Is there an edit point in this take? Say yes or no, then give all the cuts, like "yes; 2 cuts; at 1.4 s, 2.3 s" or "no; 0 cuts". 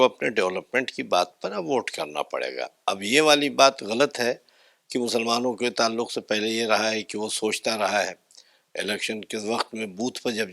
no; 0 cuts